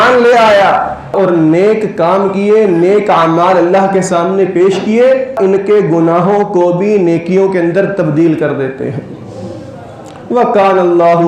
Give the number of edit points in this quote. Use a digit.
2